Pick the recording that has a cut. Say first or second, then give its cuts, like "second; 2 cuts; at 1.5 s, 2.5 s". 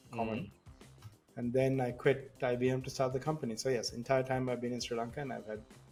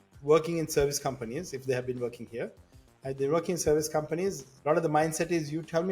second; 1 cut; at 4.5 s